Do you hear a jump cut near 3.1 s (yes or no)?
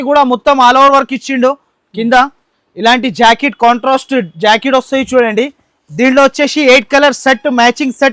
no